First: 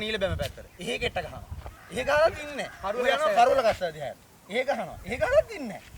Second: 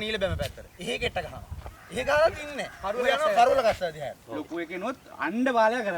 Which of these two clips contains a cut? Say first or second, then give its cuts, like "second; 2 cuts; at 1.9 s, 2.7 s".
second; 1 cut; at 4.2 s